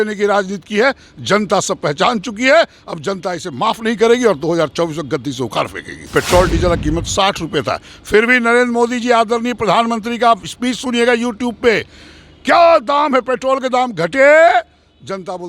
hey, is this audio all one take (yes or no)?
no